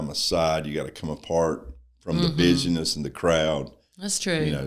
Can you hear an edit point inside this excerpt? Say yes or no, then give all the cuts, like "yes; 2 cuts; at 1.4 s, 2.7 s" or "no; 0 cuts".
no; 0 cuts